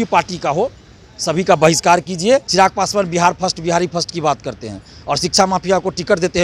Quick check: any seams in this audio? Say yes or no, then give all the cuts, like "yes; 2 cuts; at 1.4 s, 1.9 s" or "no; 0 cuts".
yes; 1 cut; at 2.5 s